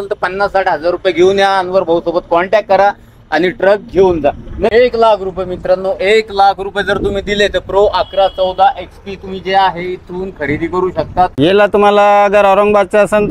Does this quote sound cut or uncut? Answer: cut